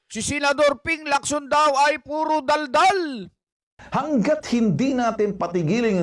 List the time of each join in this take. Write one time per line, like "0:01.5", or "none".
0:03.8